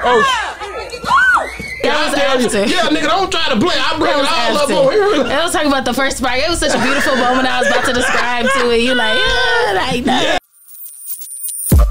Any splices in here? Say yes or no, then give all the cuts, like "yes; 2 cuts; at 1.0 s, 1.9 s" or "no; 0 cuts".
yes; 1 cut; at 10.4 s